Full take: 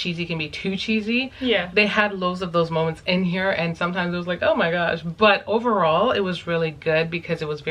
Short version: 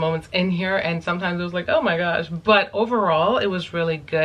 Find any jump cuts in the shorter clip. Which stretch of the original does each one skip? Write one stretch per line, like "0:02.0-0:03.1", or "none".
none